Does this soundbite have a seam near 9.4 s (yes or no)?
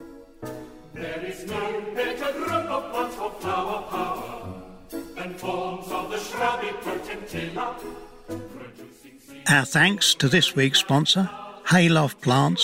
yes